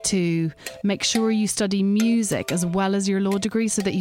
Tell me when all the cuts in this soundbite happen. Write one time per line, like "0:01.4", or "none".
none